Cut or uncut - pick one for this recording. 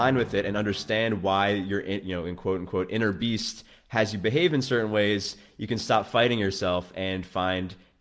uncut